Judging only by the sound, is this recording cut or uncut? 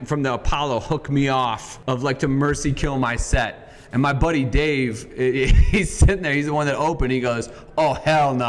uncut